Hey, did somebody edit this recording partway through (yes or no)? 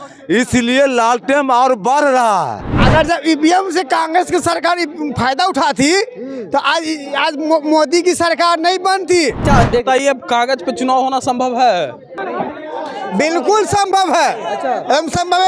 yes